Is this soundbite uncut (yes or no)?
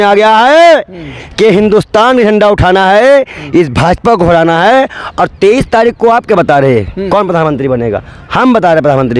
yes